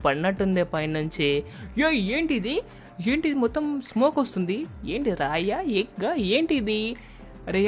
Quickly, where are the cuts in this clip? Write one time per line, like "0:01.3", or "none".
none